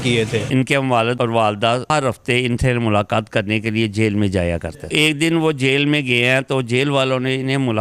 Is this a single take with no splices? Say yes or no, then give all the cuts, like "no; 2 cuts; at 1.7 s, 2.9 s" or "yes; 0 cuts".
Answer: no; 3 cuts; at 0.9 s, 1.8 s, 4.9 s